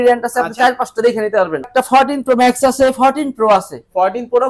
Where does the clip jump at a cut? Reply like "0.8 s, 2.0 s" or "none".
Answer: 1.7 s